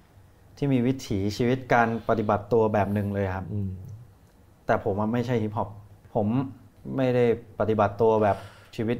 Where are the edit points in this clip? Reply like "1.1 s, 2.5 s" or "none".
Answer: 6.0 s, 6.7 s

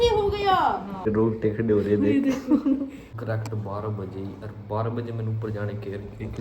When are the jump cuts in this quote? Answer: 1.0 s, 3.1 s

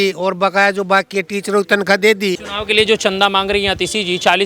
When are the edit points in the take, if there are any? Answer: 2.5 s

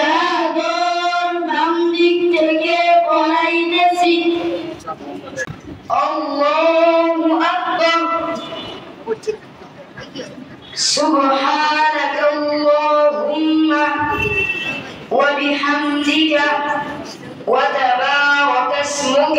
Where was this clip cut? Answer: 5.5 s

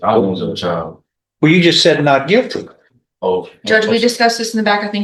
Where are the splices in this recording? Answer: none

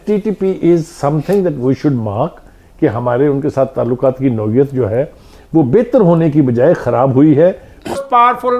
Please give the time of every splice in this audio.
none

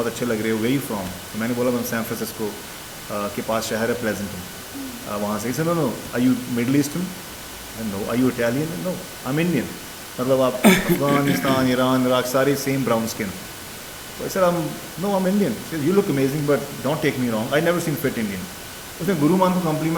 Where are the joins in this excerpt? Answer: none

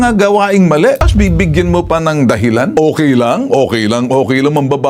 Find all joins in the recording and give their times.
1.1 s, 2.7 s

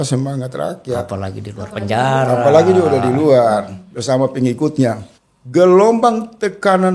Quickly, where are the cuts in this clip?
5.1 s

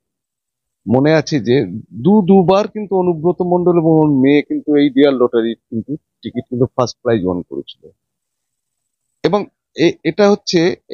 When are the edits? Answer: none

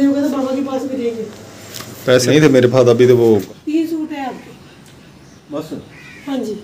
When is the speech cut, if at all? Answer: 2.3 s, 3.5 s

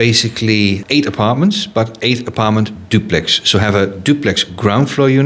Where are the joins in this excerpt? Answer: none

